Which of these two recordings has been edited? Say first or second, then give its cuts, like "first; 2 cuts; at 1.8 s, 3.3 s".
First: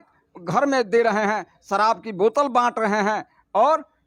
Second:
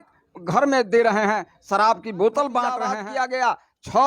second; 1 cut; at 2.8 s